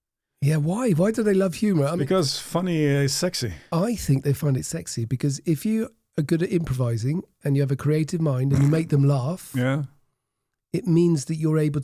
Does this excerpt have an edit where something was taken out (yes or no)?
yes